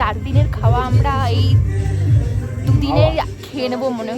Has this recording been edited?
no; 0 cuts

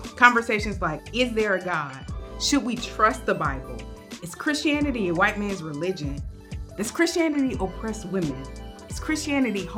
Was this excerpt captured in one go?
yes; 0 cuts

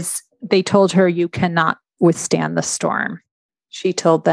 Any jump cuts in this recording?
yes; 1 cut; at 3.4 s

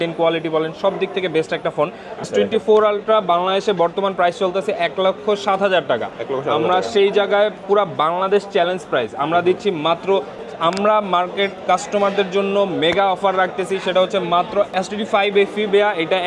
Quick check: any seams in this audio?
yes; 3 cuts; at 2.3 s, 10.5 s, 14.7 s

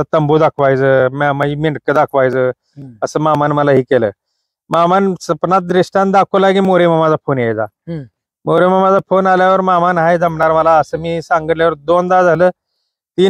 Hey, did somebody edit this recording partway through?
no; 0 cuts

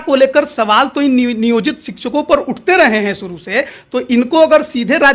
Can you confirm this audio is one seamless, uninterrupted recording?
yes; 0 cuts

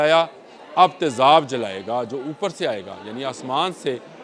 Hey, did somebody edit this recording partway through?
no; 0 cuts

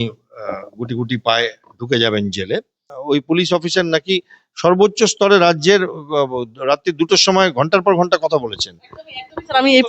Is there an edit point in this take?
yes; 1 cut; at 2.9 s

